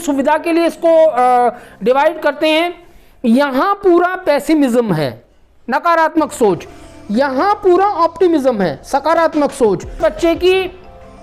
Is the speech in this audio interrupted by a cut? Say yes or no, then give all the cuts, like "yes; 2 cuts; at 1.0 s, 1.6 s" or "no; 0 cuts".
yes; 1 cut; at 10.0 s